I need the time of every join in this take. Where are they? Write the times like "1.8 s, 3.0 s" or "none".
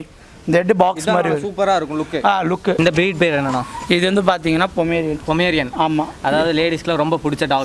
2.8 s

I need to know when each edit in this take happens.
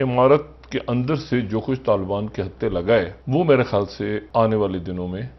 3.2 s, 4.2 s

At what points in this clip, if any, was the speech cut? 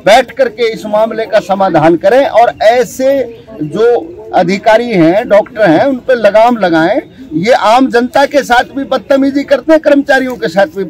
none

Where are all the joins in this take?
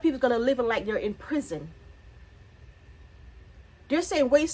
none

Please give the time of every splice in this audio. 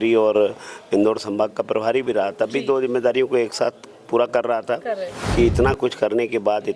5.1 s

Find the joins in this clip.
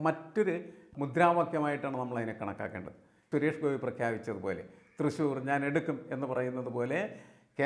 0.9 s, 3.2 s

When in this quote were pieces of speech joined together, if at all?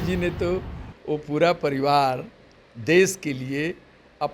none

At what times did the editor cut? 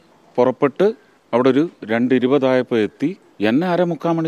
1.1 s, 3.3 s

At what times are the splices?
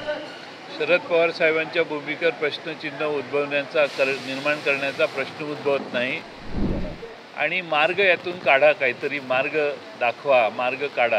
6.6 s

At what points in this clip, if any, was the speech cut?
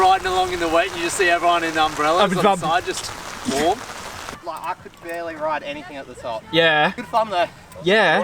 4.3 s, 7.0 s

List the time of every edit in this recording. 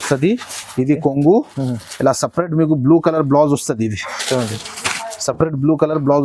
none

